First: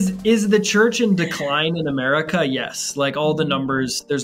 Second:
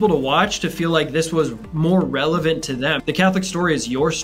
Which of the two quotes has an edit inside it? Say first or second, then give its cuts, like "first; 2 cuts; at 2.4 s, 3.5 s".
second; 1 cut; at 3.0 s